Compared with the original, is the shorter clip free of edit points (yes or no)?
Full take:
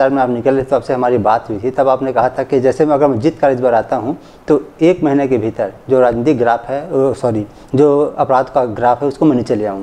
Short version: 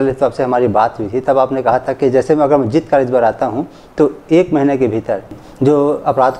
no